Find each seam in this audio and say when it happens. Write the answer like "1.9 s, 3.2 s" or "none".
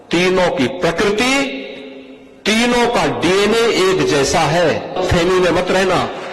5.0 s